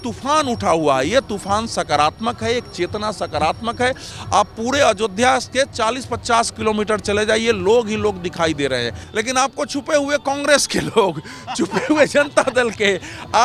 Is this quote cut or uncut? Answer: cut